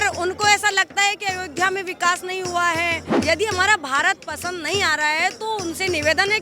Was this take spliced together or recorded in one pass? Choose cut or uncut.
cut